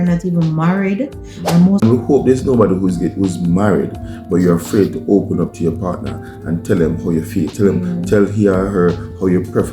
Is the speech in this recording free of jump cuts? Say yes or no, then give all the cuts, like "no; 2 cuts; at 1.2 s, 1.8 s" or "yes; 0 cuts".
no; 1 cut; at 1.8 s